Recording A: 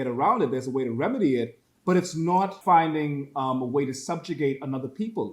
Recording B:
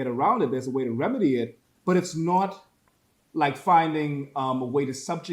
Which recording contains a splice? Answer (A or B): A